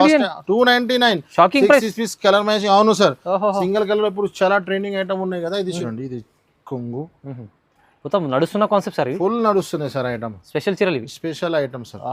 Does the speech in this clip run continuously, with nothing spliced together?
no; 1 cut; at 5.8 s

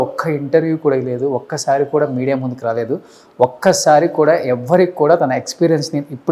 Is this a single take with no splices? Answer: yes; 0 cuts

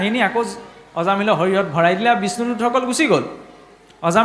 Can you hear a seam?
no; 0 cuts

